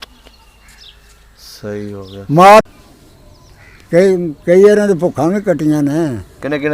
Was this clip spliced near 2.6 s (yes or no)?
yes